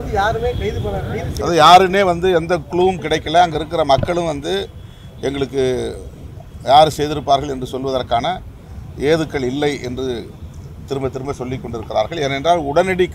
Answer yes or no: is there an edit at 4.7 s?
no